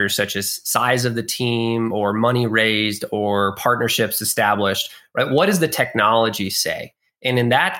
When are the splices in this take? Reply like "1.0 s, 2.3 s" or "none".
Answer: none